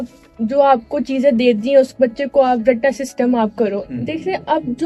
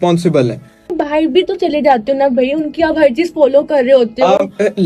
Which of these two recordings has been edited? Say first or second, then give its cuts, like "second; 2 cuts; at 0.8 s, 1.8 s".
second; 1 cut; at 0.9 s